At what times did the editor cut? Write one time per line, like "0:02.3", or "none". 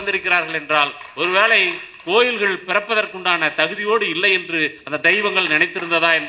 none